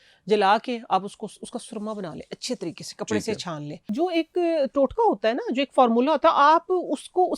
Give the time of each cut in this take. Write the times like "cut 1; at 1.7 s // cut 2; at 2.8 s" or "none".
cut 1; at 3.9 s